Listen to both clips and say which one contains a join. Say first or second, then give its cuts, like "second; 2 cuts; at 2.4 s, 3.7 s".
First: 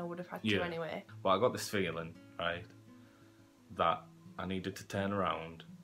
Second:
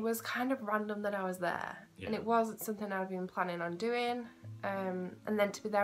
first; 1 cut; at 1.0 s